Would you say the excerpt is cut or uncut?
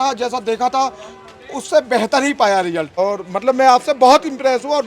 cut